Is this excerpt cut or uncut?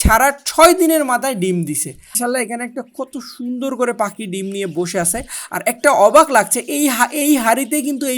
cut